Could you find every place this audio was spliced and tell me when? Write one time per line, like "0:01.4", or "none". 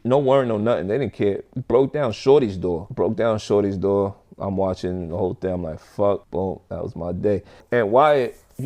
0:07.6